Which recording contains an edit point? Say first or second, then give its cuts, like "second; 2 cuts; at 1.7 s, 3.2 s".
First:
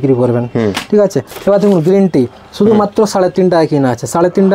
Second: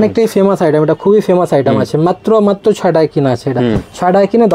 first; 1 cut; at 1.3 s